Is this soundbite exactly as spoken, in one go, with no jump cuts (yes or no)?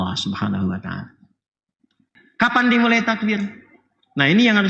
no